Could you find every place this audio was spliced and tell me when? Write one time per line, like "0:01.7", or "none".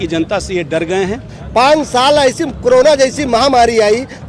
0:01.3